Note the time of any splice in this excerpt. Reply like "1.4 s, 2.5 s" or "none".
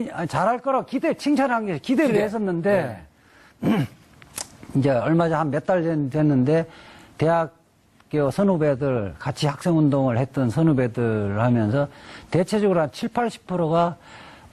6.0 s